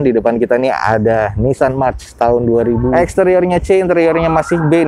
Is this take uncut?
no; 1 cut; at 2.9 s

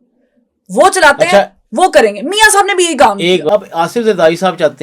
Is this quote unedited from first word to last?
no; 1 cut; at 3.5 s

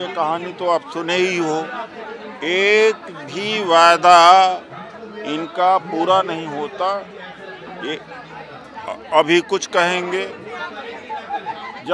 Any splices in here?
no; 0 cuts

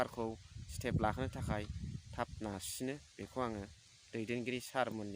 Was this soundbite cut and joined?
yes; 1 cut; at 3.8 s

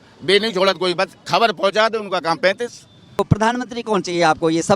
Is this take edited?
yes; 1 cut; at 3.1 s

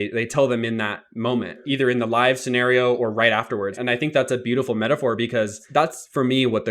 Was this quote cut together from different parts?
yes; 3 cuts; at 1.6 s, 3.8 s, 5.6 s

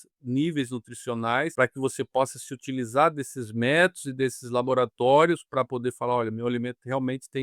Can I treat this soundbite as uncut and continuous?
no; 1 cut; at 1.5 s

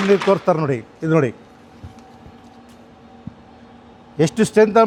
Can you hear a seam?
no; 0 cuts

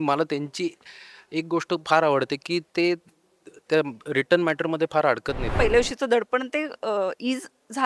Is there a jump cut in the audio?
yes; 1 cut; at 5.5 s

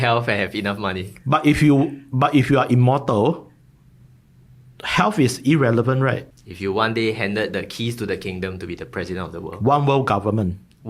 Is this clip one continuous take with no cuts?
no; 1 cut; at 6.3 s

